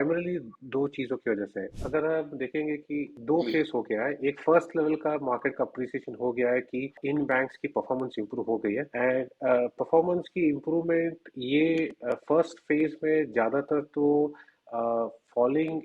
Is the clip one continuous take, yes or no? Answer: no